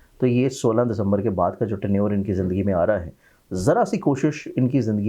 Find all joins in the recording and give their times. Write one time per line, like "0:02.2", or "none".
none